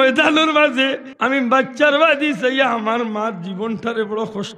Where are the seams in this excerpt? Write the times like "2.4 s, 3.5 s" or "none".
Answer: 1.1 s